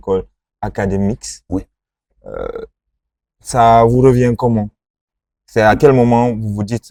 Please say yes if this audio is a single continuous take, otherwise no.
yes